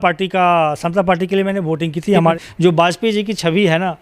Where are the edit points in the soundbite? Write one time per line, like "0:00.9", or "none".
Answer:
0:02.4